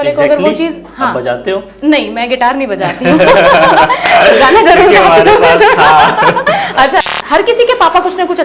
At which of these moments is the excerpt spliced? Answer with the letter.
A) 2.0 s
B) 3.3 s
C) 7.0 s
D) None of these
C